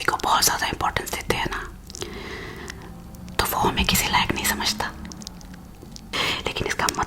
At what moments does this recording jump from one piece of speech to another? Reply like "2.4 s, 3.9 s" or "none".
1.9 s, 6.1 s